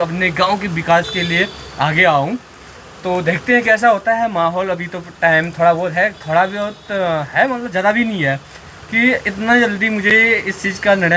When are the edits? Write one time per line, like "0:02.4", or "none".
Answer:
none

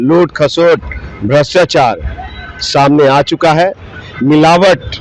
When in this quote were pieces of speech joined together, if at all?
none

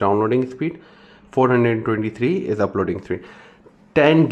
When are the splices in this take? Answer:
none

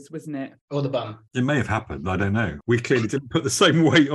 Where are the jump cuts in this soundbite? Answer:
0:01.2
0:02.6

